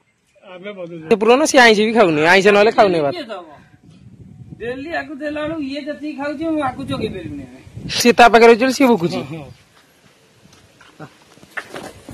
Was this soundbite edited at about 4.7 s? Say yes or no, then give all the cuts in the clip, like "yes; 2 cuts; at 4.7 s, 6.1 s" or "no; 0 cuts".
no; 2 cuts; at 1.1 s, 8.0 s